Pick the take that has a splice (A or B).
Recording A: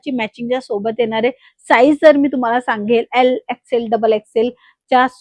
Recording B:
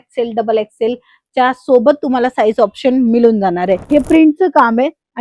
B